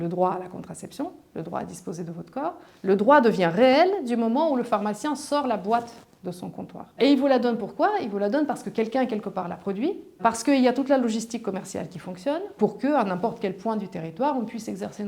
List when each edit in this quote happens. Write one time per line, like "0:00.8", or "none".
0:07.0
0:10.2
0:12.5